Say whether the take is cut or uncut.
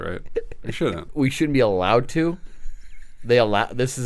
cut